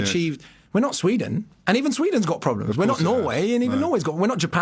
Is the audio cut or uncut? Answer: uncut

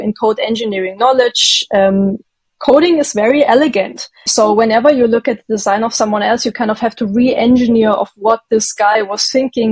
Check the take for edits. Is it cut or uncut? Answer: cut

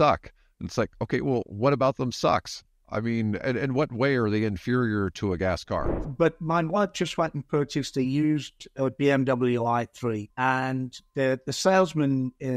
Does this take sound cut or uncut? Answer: cut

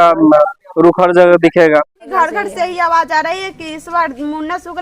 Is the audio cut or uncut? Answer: cut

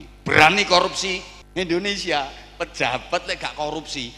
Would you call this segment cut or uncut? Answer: cut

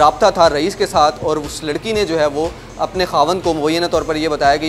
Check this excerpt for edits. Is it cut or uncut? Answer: uncut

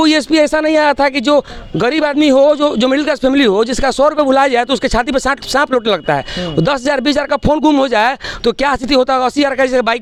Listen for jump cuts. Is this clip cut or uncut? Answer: uncut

